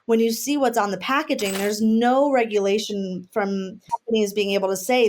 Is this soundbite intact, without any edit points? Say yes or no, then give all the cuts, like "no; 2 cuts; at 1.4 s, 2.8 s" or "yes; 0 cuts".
no; 1 cut; at 3.8 s